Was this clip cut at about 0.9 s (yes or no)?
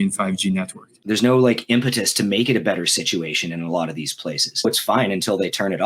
yes